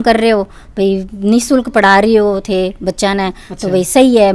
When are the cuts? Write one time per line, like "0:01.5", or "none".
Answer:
none